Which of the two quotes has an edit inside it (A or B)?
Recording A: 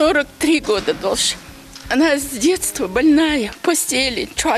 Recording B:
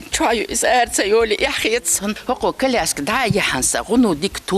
B